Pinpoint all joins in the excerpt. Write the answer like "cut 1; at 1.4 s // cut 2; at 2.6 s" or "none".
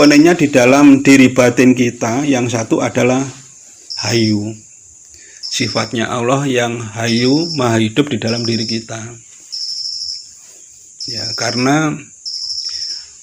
none